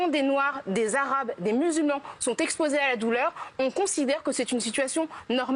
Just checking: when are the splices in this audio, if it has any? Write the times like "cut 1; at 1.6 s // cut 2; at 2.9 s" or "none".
none